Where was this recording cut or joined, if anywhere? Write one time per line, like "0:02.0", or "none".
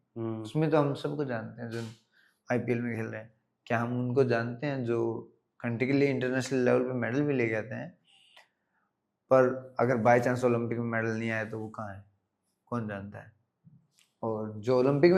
none